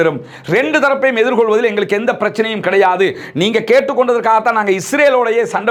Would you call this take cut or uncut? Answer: uncut